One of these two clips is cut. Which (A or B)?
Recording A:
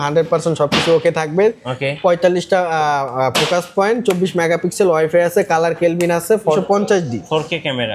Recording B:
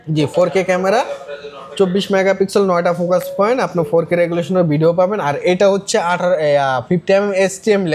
A